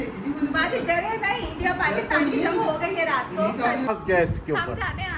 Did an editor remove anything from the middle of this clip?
yes; 1 cut; at 3.9 s

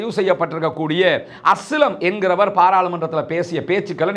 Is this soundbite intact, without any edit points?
yes; 0 cuts

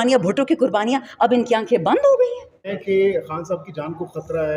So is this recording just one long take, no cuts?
no; 1 cut; at 2.8 s

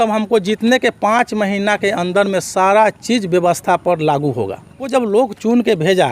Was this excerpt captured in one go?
no; 1 cut; at 4.8 s

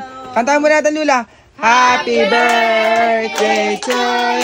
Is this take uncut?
yes; 0 cuts

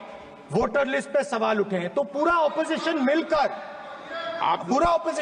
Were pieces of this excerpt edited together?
no; 0 cuts

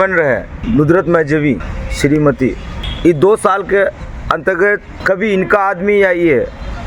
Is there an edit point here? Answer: no; 0 cuts

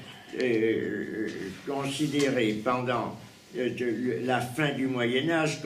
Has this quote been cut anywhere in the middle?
no; 0 cuts

